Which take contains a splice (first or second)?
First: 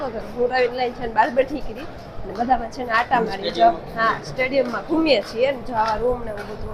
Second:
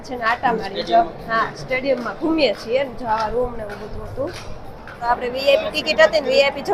second